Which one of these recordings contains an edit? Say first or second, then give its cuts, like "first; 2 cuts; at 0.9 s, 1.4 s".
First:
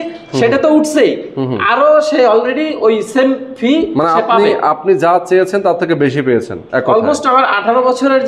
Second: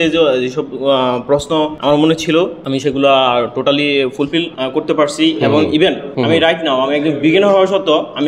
second; 4 cuts; at 1.8 s, 2.6 s, 4.6 s, 6.1 s